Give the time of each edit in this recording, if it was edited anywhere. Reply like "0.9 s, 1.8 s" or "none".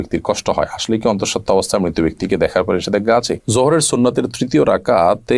3.4 s